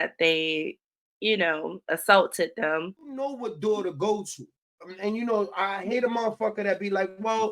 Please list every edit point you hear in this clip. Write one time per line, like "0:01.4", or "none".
0:03.4